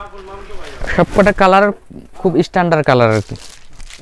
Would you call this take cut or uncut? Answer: uncut